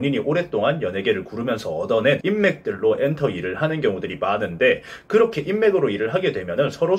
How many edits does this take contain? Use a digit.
1